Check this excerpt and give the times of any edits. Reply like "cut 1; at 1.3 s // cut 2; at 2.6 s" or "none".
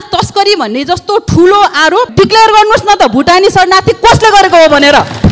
cut 1; at 2.1 s